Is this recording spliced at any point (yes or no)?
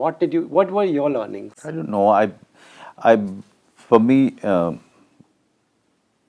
no